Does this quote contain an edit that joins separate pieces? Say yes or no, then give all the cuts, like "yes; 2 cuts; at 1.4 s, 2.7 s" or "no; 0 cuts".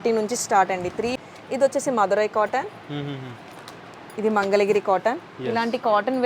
yes; 1 cut; at 1.2 s